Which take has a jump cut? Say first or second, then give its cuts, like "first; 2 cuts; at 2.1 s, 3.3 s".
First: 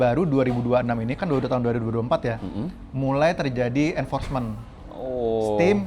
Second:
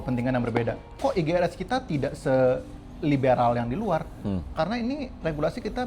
second; 1 cut; at 0.9 s